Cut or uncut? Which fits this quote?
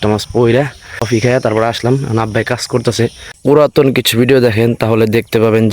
cut